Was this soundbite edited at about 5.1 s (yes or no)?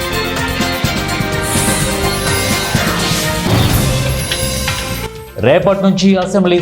yes